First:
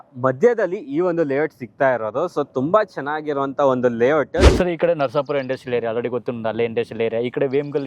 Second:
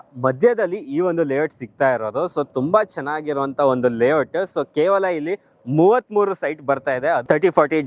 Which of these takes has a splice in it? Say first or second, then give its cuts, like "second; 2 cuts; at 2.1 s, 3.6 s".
first; 1 cut; at 4.5 s